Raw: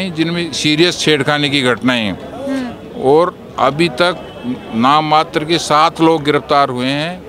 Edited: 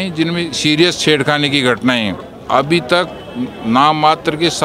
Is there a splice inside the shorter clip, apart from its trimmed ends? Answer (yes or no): yes